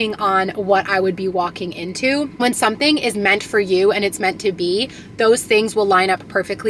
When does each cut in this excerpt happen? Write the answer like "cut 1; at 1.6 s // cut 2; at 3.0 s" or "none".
cut 1; at 2.4 s